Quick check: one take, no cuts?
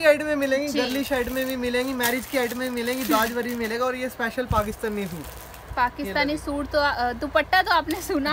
yes; 0 cuts

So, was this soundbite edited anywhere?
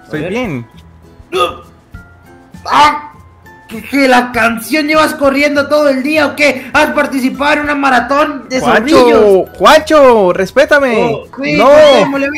yes; 1 cut; at 11.3 s

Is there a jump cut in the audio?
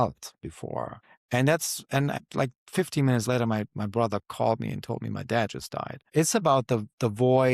yes; 2 cuts; at 2.2 s, 6.0 s

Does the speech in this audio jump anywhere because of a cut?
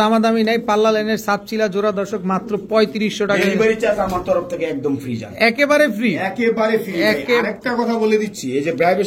no; 0 cuts

